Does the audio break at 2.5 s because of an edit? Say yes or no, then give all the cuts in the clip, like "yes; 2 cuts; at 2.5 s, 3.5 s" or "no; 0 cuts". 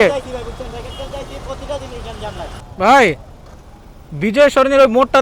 yes; 1 cut; at 2.5 s